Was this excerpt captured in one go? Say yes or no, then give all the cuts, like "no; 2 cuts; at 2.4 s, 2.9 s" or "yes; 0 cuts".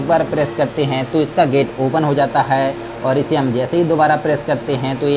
yes; 0 cuts